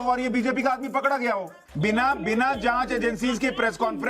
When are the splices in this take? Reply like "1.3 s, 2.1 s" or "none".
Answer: 1.6 s